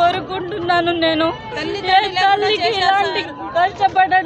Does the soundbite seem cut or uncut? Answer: uncut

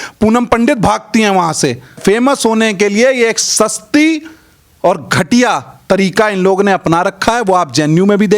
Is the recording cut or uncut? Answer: cut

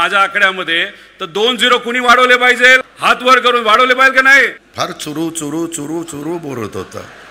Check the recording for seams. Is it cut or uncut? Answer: cut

